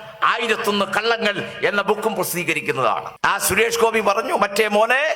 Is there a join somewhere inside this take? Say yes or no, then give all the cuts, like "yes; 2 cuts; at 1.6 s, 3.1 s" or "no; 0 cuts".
yes; 1 cut; at 3.1 s